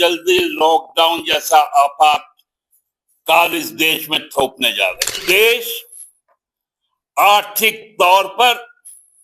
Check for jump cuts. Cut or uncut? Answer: cut